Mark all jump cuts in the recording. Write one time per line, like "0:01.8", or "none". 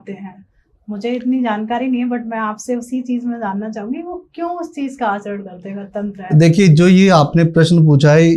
none